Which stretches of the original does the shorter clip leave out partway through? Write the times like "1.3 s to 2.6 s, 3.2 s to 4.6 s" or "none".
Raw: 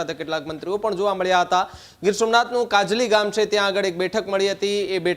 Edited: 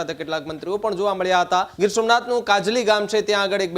1.7 s to 2.0 s